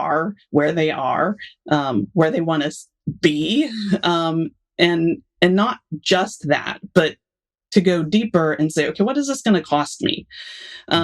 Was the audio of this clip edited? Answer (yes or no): no